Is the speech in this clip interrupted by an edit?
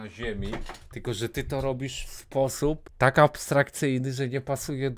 yes; 1 cut; at 2.9 s

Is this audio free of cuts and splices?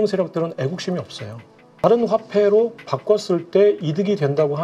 no; 1 cut; at 1.8 s

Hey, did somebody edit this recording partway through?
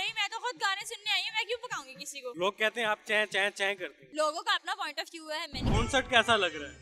yes; 3 cuts; at 2.3 s, 4.0 s, 5.6 s

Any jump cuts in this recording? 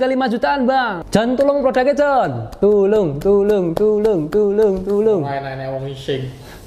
yes; 1 cut; at 1.0 s

